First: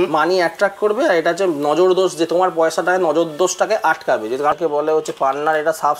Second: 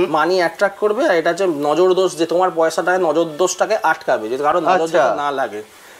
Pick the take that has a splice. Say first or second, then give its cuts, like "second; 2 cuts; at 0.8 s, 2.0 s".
first; 1 cut; at 4.5 s